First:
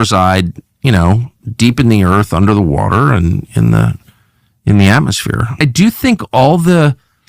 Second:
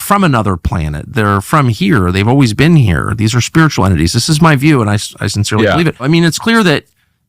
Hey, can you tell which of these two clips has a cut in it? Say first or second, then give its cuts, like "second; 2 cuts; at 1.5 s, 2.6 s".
second; 1 cut; at 6.0 s